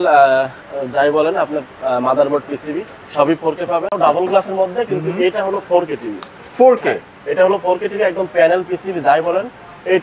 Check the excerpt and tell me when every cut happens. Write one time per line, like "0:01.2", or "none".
0:04.0